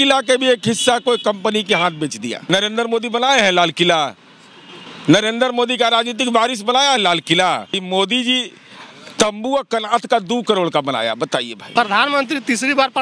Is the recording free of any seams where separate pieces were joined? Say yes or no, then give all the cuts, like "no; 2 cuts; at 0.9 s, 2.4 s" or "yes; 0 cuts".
no; 3 cuts; at 2.3 s, 7.8 s, 11.6 s